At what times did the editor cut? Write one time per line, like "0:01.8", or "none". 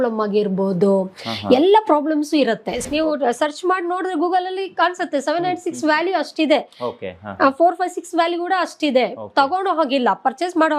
0:02.9

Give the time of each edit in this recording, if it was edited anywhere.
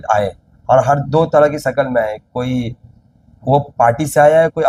none

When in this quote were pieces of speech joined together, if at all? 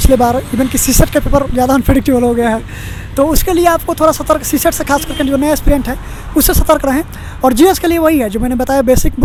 none

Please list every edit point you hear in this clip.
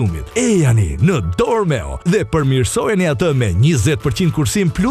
none

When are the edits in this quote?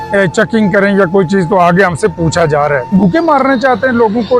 0:02.9

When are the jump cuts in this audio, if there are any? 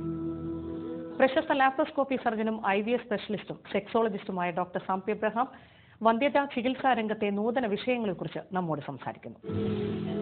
0:01.0

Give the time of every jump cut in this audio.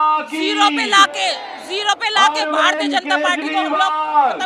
none

